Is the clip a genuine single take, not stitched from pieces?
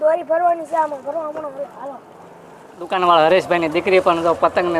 no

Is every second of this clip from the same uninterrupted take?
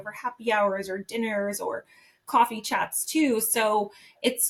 yes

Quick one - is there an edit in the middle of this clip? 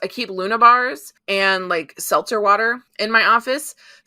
yes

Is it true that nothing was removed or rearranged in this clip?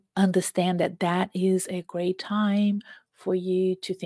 yes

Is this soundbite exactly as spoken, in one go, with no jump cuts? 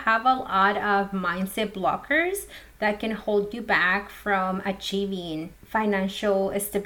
no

